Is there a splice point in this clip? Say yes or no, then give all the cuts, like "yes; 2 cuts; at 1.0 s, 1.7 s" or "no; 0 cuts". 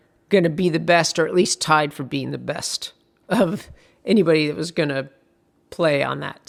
no; 0 cuts